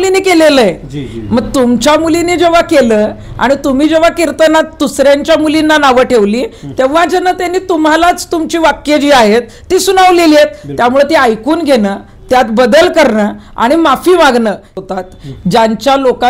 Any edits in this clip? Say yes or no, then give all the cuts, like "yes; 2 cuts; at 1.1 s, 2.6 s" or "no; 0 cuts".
yes; 1 cut; at 14.8 s